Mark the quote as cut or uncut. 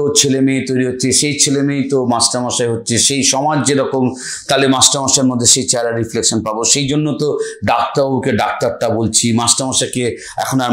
uncut